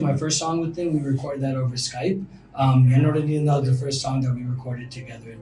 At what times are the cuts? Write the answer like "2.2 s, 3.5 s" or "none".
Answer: none